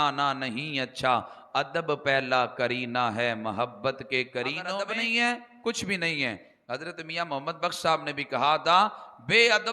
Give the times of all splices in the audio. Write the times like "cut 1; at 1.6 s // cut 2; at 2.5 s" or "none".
cut 1; at 4.7 s